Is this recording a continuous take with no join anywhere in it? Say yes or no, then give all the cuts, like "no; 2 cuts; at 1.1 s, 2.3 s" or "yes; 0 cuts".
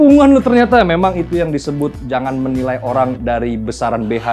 yes; 0 cuts